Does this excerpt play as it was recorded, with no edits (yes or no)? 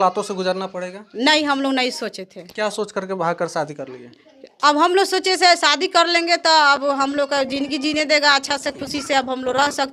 yes